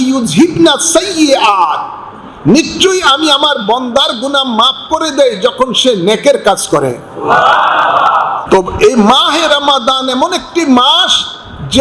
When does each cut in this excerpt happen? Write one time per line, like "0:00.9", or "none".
0:08.4